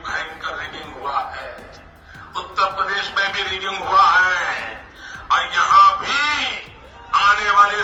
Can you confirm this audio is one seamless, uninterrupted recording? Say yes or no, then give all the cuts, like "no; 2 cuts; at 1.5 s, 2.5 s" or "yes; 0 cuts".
yes; 0 cuts